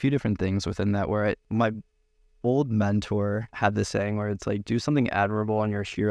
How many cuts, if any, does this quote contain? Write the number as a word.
one